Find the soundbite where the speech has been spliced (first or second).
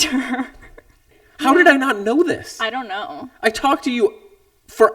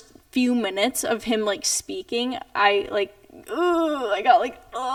first